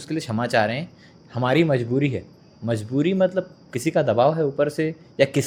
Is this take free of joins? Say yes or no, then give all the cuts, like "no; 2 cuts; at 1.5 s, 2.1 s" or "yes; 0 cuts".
yes; 0 cuts